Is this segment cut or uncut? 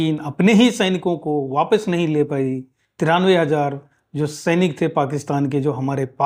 uncut